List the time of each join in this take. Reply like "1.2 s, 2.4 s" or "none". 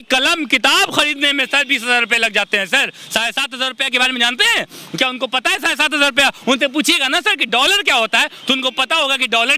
none